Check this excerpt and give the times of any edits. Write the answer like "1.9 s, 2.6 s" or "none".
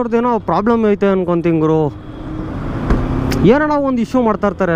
none